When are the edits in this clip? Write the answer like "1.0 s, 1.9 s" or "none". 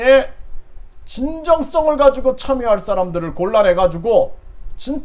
none